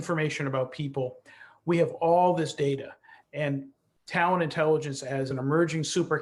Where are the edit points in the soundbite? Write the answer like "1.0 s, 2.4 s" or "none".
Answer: 5.3 s